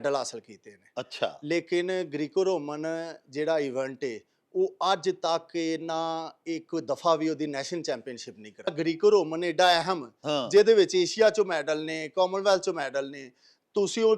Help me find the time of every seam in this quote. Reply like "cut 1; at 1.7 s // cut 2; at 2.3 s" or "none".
cut 1; at 8.7 s